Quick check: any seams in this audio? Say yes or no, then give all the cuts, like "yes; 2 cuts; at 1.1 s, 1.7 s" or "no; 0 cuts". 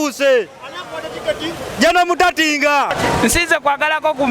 yes; 1 cut; at 2.9 s